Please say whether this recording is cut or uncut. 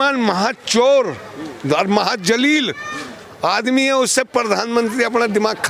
uncut